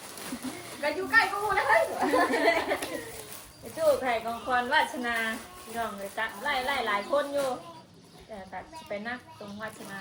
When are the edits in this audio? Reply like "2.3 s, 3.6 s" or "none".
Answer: none